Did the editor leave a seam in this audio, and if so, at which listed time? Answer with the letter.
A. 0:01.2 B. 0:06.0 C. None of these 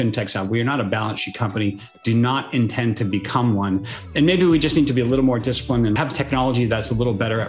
B